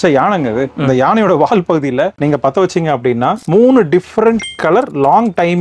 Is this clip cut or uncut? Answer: cut